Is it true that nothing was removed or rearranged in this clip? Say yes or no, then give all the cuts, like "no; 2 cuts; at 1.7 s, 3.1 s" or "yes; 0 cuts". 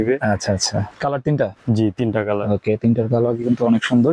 no; 1 cut; at 0.9 s